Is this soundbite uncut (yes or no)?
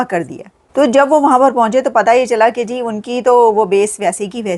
yes